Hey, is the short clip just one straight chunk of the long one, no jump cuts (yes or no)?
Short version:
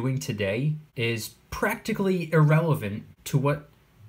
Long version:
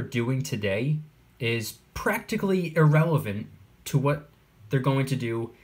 no